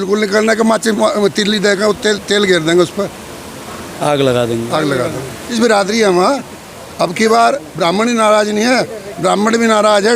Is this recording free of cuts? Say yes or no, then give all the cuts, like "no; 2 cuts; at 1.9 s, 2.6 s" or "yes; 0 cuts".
no; 1 cut; at 5.4 s